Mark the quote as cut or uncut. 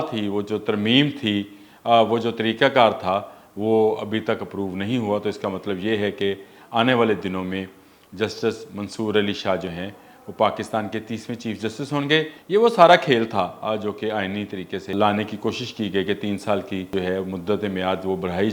cut